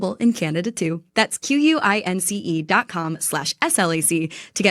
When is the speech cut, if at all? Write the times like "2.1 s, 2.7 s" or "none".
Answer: none

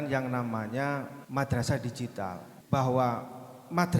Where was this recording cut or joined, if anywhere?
1.2 s, 2.5 s

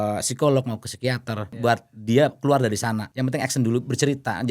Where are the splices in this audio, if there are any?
1.5 s, 3.1 s

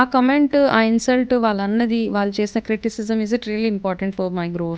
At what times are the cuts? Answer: none

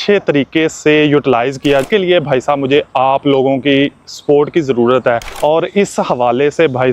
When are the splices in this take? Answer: 1.8 s, 5.3 s

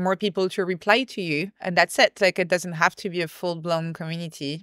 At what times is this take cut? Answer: 1.6 s

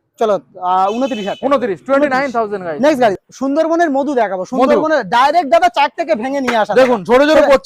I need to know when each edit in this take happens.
3.3 s

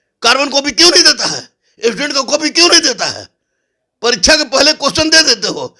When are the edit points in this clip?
none

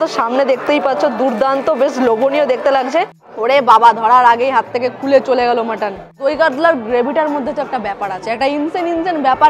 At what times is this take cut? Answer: 3.2 s, 6.2 s

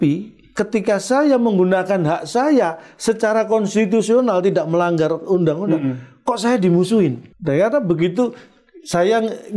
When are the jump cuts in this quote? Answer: 7.3 s

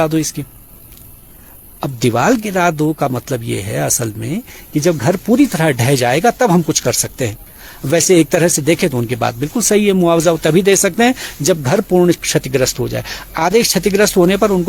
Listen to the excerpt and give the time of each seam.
none

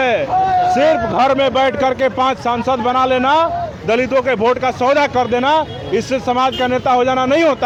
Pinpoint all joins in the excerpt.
none

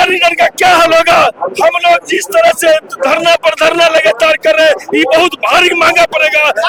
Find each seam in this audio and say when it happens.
none

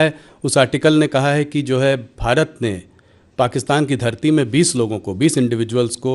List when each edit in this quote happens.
none

